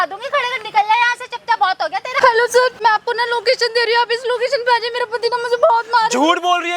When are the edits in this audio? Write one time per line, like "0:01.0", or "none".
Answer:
0:02.1
0:02.8